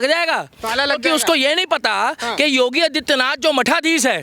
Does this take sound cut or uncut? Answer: uncut